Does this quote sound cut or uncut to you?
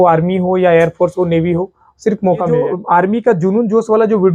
cut